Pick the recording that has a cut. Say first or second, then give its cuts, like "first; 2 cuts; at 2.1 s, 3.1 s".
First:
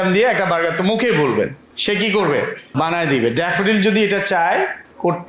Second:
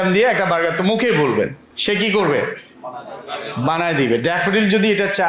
first; 1 cut; at 2.6 s